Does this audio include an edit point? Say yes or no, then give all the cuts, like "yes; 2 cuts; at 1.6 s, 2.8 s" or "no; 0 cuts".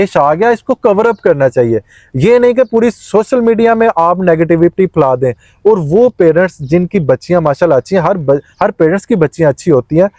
no; 0 cuts